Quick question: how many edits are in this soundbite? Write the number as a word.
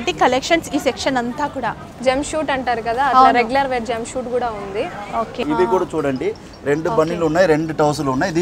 two